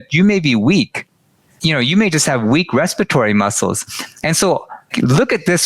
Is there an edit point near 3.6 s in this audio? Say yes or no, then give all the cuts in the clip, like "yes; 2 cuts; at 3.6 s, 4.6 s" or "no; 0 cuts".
no; 2 cuts; at 1.5 s, 4.9 s